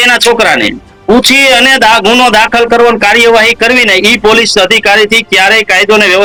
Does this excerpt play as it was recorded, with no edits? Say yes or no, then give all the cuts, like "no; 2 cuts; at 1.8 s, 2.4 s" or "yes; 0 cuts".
yes; 0 cuts